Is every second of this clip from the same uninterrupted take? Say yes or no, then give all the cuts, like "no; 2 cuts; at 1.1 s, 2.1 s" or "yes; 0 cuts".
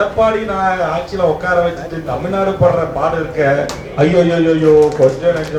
yes; 0 cuts